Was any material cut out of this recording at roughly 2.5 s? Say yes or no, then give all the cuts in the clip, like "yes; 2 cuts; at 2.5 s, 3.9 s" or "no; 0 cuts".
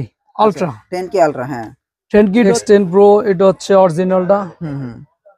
yes; 1 cut; at 2.5 s